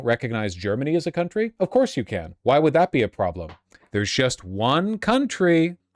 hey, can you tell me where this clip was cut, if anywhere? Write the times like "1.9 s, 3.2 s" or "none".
none

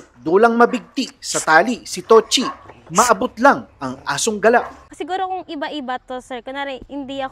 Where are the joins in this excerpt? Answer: 4.8 s

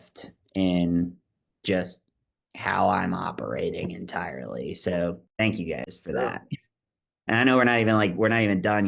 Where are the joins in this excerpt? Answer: none

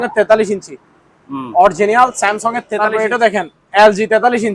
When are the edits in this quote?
2.8 s

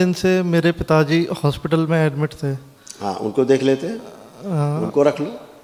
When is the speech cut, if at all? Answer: none

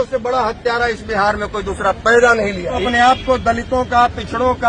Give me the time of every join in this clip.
2.8 s

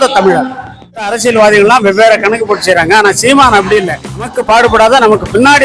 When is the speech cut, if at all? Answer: 0.9 s, 4.4 s

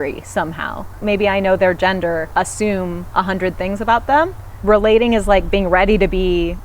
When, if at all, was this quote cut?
1.0 s, 2.3 s, 4.5 s

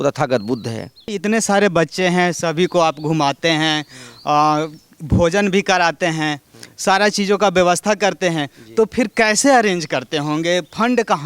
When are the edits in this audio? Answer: 1.1 s

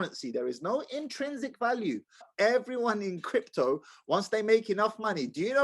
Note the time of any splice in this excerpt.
2.3 s

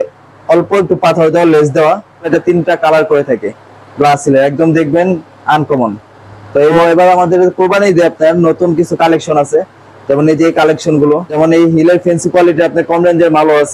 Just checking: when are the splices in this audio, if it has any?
2.3 s, 6.8 s, 11.3 s

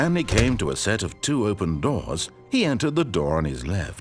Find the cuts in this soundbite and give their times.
none

